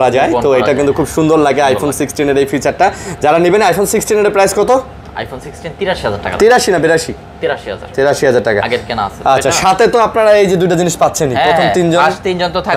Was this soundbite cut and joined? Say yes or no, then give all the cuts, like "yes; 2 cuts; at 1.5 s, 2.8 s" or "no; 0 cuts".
no; 0 cuts